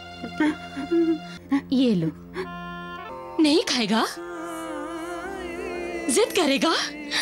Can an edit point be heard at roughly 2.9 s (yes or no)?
yes